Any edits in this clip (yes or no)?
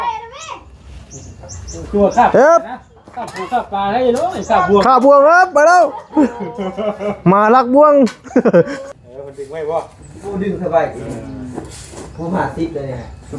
yes